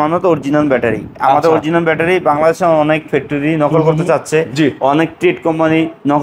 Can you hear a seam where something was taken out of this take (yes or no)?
no